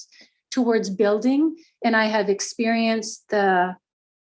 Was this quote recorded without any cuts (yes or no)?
yes